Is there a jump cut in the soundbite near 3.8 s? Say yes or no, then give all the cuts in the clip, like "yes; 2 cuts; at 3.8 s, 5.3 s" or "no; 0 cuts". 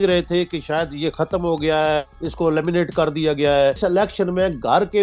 yes; 1 cut; at 3.8 s